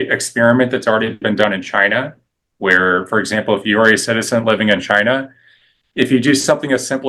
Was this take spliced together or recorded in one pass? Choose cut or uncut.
uncut